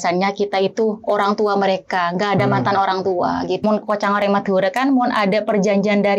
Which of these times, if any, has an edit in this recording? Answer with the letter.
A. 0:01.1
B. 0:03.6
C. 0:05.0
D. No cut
B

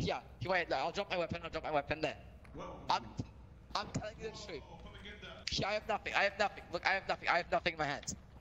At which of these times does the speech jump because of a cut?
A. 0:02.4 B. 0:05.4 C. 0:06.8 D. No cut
B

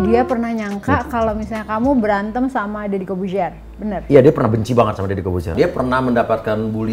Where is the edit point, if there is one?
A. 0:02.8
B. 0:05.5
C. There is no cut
B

